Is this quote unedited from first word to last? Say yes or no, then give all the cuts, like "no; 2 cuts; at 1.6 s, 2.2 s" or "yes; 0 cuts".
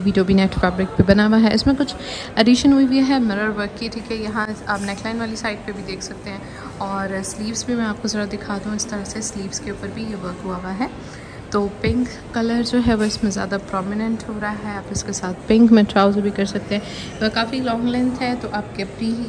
yes; 0 cuts